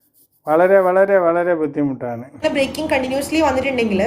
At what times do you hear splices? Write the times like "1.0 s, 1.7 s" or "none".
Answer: 2.4 s